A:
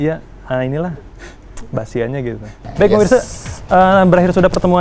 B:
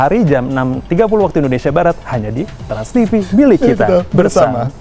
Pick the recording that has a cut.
A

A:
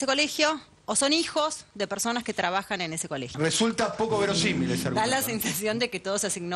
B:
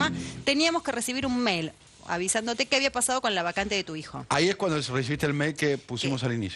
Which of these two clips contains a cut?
B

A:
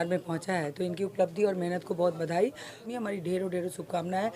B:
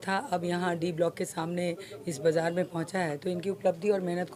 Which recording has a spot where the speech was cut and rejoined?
A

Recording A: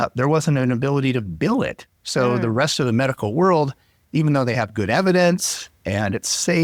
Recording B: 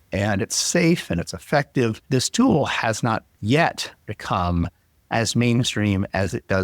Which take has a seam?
B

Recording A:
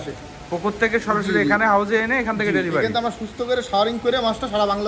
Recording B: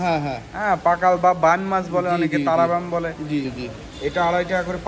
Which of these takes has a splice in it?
B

